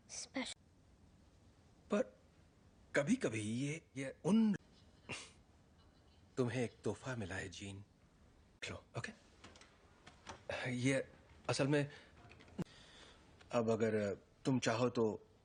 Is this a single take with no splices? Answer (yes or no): yes